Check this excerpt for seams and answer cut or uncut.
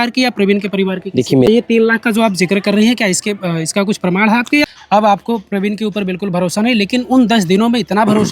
cut